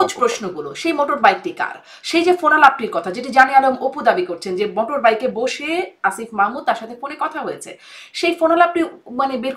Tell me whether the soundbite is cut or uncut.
uncut